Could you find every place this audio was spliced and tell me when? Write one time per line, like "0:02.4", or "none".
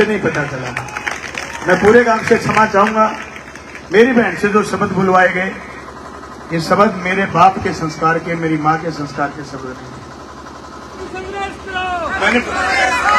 0:11.0